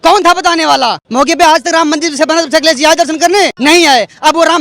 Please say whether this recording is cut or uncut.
cut